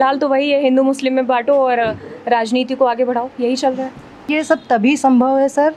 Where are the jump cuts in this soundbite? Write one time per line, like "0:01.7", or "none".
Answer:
0:04.3